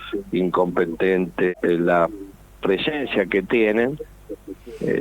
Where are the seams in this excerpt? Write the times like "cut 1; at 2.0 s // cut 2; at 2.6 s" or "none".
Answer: cut 1; at 1.5 s

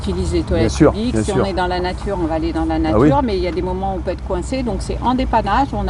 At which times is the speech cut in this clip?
none

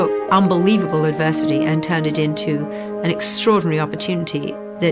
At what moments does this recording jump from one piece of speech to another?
cut 1; at 2.1 s

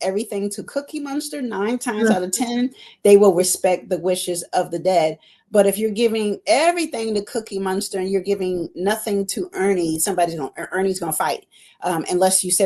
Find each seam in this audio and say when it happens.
none

